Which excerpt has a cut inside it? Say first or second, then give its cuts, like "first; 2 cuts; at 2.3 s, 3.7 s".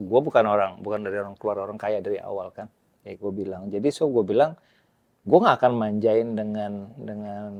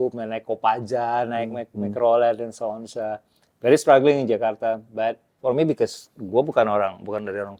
second; 1 cut; at 5.3 s